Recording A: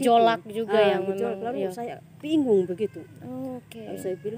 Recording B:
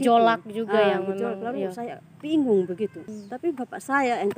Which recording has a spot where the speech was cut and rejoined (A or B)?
B